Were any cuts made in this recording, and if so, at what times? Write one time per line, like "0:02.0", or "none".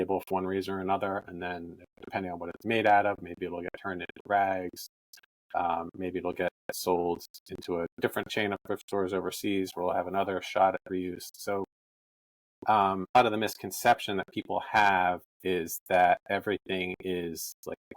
0:13.2